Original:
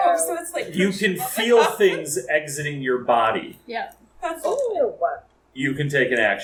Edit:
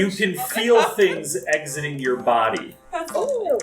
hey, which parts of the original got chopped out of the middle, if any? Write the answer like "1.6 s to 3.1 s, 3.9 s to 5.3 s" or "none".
3.5 s to 4.0 s